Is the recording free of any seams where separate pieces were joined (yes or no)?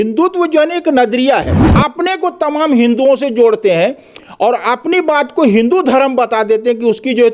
no